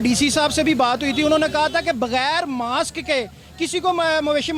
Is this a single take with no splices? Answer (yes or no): yes